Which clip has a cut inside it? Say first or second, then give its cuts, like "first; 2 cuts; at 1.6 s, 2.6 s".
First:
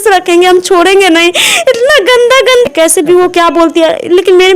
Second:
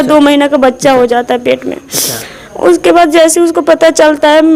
first; 1 cut; at 2.7 s